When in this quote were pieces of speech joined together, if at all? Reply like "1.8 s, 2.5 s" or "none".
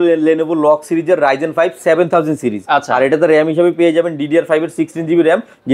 none